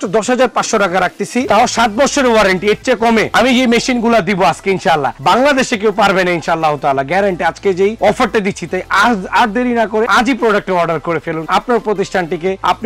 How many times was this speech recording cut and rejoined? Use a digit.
0